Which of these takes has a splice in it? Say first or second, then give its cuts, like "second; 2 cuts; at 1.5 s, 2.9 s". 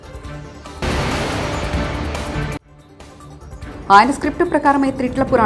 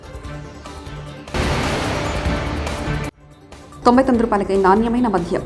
second; 2 cuts; at 0.8 s, 2.9 s